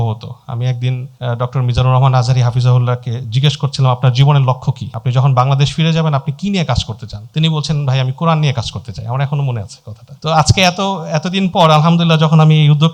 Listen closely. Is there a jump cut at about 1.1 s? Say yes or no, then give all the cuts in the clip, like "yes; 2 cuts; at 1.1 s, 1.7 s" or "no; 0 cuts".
no; 0 cuts